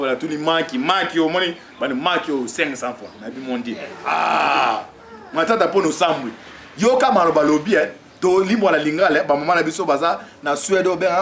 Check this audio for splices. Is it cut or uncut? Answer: cut